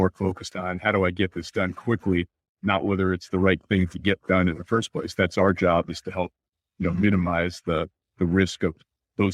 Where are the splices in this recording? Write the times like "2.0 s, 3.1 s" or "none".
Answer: none